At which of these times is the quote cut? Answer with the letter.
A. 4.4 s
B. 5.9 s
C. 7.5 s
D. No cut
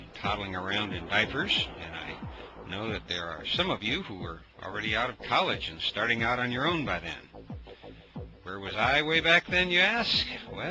C